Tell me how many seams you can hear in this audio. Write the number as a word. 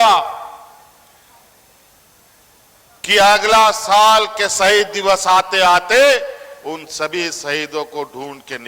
zero